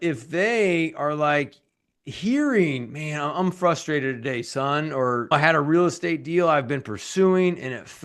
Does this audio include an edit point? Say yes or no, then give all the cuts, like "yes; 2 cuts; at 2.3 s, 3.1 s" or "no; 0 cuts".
yes; 1 cut; at 5.2 s